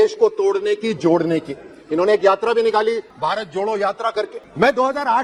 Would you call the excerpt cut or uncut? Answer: uncut